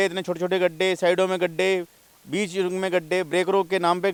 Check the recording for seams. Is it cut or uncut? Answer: uncut